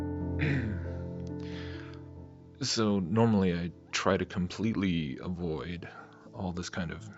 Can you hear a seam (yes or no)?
no